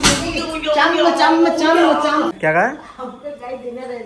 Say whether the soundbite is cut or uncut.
cut